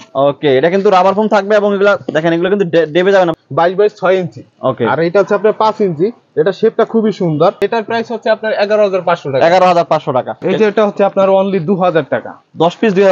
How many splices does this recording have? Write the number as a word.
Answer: three